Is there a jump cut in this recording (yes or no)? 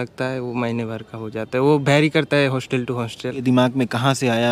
yes